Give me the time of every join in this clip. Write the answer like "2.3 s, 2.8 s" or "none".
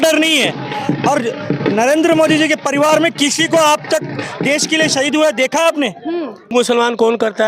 6.5 s